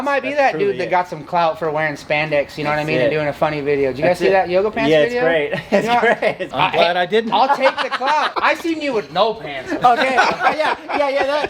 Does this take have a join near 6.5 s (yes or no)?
yes